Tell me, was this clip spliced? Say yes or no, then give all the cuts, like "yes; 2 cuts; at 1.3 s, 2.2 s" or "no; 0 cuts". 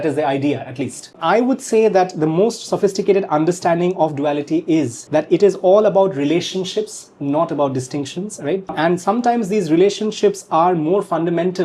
yes; 3 cuts; at 1.1 s, 5.0 s, 8.7 s